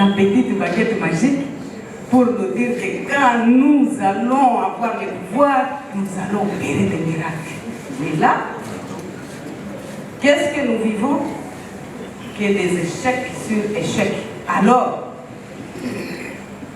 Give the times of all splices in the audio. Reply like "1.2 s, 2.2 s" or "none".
none